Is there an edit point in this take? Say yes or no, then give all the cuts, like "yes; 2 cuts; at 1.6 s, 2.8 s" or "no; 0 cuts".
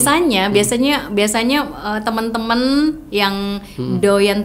no; 0 cuts